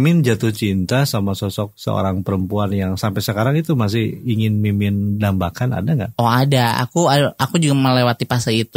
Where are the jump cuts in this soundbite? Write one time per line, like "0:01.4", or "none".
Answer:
none